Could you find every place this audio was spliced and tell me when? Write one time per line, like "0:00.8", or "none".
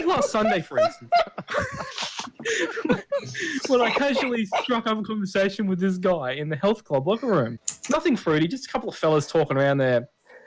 0:07.7